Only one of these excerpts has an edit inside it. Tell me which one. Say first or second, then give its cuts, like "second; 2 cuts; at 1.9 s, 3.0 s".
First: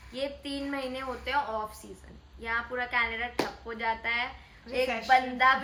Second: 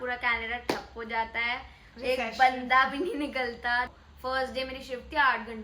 second; 1 cut; at 3.9 s